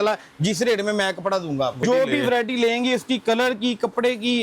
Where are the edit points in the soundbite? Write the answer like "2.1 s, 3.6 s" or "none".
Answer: 1.8 s